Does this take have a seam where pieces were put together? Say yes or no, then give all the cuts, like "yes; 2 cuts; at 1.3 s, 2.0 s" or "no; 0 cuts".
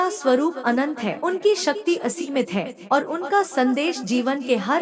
yes; 1 cut; at 1.1 s